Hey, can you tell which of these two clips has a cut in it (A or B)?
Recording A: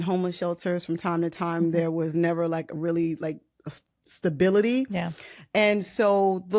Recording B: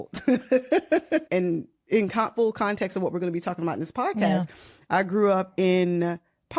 B